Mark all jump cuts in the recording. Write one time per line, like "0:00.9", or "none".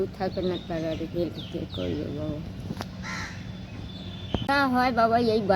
0:04.5